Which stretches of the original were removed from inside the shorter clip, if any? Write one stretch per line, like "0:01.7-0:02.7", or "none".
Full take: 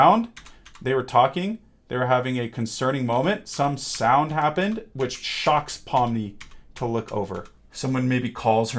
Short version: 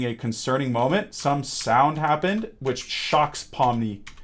none